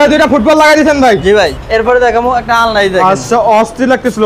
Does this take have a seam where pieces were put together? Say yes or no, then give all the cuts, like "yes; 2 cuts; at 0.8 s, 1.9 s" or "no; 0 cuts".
yes; 1 cut; at 1.5 s